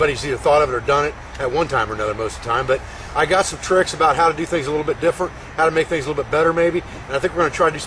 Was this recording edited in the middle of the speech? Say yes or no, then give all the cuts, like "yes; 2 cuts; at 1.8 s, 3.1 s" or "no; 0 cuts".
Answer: yes; 1 cut; at 3.2 s